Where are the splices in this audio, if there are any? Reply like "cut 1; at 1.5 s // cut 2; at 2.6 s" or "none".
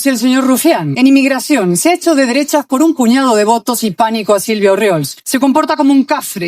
cut 1; at 0.9 s // cut 2; at 5.2 s